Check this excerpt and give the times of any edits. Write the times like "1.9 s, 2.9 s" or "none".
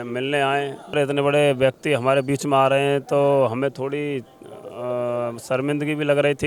1.0 s